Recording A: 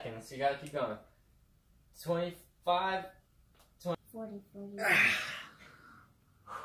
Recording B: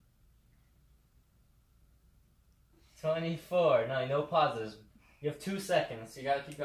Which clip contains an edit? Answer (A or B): A